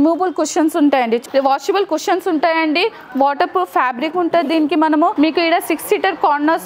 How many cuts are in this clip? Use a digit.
2